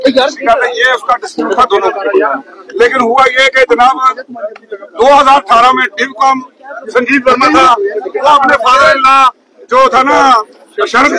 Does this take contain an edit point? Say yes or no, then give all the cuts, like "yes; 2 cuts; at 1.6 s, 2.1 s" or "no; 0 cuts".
yes; 1 cut; at 1.6 s